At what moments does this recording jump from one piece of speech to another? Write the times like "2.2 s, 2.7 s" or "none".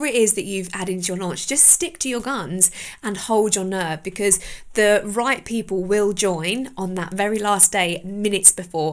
none